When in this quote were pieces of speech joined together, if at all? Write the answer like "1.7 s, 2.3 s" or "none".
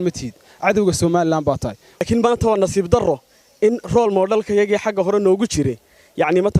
2.0 s